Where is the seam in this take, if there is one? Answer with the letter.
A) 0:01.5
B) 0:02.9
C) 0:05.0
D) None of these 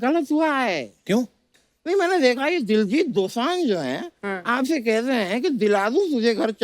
A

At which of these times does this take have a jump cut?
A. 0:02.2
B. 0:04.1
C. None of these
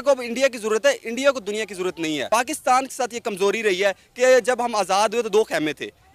C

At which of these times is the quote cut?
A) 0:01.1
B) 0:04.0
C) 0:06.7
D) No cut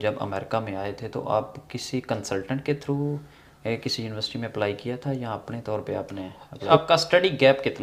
C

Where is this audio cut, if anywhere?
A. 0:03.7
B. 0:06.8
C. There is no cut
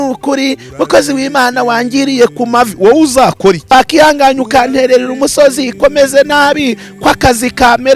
A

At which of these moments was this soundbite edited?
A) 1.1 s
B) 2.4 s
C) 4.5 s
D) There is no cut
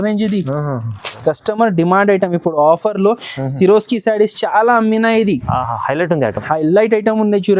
A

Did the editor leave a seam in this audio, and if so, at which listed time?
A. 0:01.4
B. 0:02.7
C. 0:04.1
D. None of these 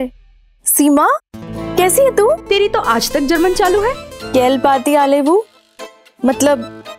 C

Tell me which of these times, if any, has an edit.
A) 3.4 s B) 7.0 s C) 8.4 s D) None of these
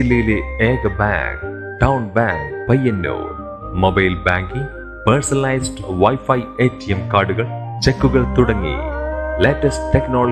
D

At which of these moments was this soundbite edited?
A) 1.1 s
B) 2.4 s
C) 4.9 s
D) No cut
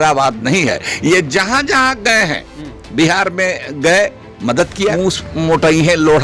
C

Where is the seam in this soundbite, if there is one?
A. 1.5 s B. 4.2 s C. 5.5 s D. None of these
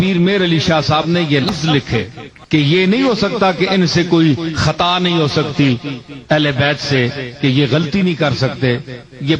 A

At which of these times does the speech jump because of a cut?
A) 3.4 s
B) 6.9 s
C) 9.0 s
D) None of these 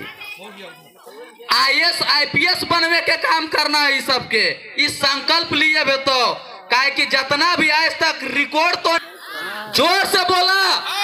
C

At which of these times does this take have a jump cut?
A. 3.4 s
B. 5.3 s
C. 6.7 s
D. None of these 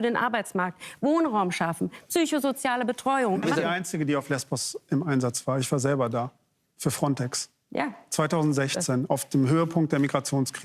A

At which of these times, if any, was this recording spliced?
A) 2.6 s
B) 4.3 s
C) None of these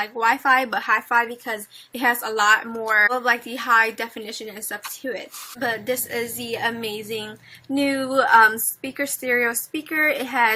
A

